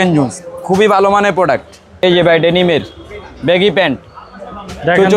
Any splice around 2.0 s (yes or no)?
yes